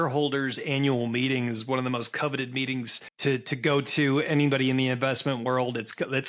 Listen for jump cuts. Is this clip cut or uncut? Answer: cut